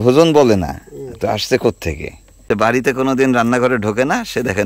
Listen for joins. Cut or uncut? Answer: cut